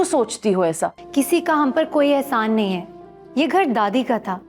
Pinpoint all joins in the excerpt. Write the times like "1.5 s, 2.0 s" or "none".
1.0 s